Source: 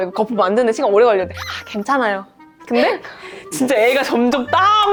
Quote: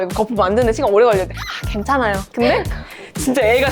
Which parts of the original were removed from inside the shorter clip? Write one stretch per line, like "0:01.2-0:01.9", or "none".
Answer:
0:02.2-0:02.6